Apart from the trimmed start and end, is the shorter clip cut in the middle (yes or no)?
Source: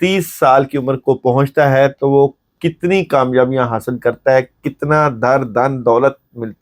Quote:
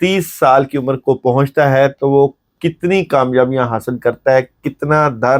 no